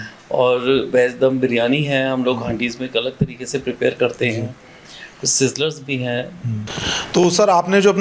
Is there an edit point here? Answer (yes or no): yes